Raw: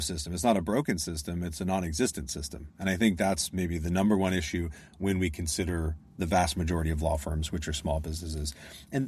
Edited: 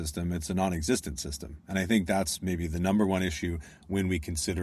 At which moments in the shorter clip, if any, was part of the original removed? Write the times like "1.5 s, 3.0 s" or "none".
none